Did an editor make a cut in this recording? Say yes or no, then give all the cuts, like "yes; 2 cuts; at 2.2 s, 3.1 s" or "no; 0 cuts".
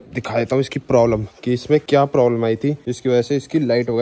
yes; 2 cuts; at 1.8 s, 2.9 s